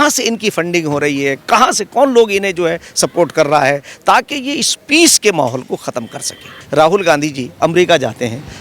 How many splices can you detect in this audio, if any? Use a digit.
1